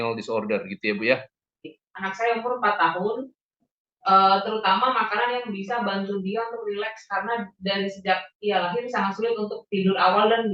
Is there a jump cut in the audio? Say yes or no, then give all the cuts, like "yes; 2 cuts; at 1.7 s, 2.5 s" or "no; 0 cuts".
yes; 1 cut; at 1.7 s